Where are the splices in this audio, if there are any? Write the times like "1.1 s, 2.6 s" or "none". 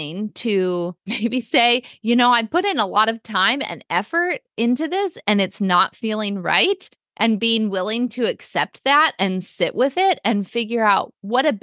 1.0 s